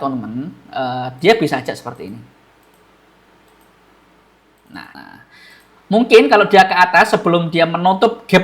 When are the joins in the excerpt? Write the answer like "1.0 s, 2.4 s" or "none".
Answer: 5.0 s